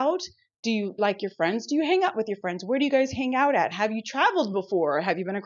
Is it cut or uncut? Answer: cut